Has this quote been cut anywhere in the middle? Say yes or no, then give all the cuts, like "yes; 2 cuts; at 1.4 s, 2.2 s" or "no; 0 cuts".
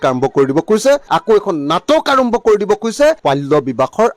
no; 0 cuts